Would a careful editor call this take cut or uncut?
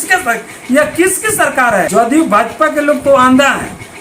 cut